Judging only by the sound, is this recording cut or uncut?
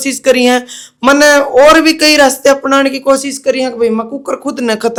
uncut